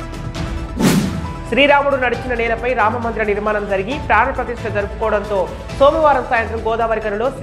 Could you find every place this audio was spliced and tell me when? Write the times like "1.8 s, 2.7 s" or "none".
1.1 s